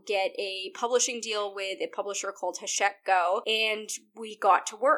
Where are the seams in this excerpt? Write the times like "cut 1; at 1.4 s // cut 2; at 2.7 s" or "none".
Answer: cut 1; at 3.4 s